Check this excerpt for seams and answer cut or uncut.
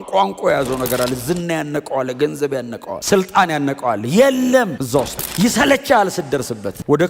uncut